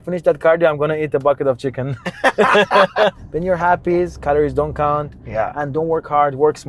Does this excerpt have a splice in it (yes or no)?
yes